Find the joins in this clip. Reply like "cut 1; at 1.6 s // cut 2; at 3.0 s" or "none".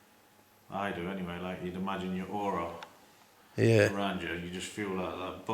none